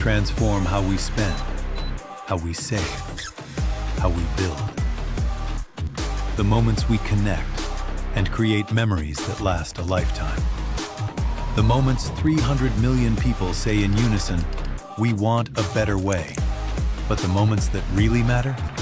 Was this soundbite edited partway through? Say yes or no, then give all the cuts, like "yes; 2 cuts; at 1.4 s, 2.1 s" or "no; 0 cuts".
no; 0 cuts